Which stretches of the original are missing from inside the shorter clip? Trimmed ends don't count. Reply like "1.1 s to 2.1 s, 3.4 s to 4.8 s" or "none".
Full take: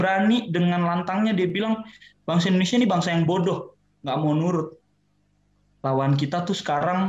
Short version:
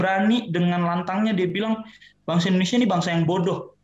none